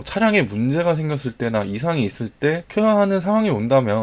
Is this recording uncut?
yes; 0 cuts

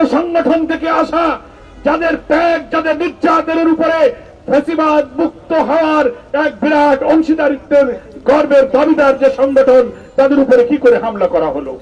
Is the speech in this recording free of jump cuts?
yes; 0 cuts

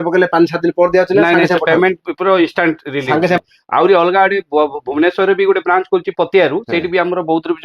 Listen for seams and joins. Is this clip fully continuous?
no; 1 cut; at 3.4 s

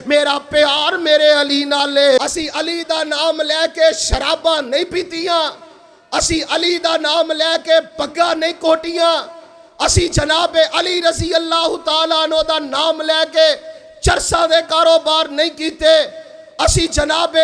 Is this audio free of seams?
no; 1 cut; at 2.2 s

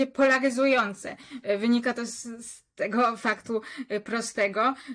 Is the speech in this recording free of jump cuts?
yes; 0 cuts

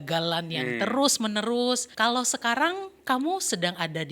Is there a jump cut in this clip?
yes; 1 cut; at 1.9 s

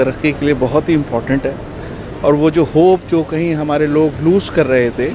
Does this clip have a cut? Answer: no; 0 cuts

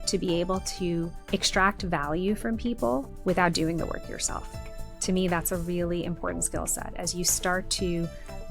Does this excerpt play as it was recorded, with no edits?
no; 1 cut; at 1.2 s

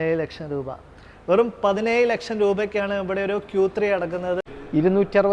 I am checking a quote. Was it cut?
yes; 1 cut; at 4.4 s

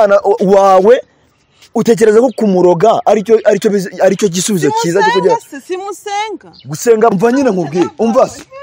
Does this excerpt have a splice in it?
yes; 1 cut; at 7.1 s

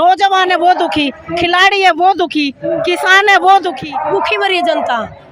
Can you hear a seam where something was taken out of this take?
yes; 1 cut; at 3.8 s

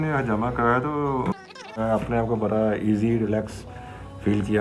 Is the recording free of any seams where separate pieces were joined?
no; 1 cut; at 1.8 s

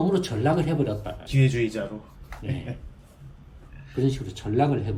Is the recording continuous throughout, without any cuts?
yes; 0 cuts

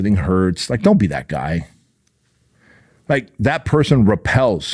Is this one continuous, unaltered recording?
yes; 0 cuts

